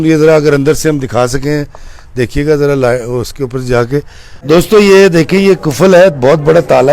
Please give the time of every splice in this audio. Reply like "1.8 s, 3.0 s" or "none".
4.3 s

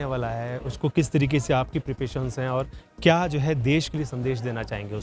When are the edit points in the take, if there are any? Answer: none

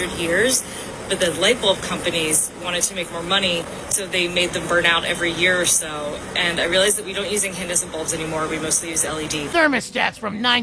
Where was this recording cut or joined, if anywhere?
9.5 s

